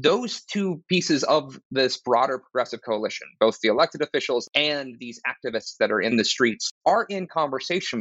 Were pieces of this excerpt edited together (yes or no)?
yes